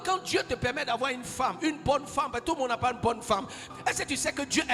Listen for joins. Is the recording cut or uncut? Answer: uncut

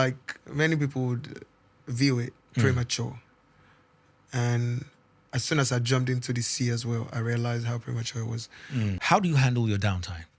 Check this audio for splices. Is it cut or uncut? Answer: cut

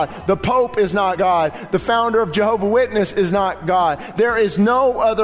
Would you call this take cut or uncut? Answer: cut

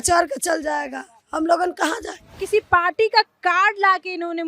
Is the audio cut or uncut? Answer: cut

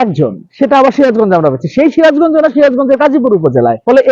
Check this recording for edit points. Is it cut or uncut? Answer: uncut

